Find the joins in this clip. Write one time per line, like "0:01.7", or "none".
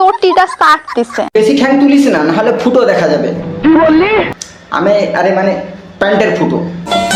none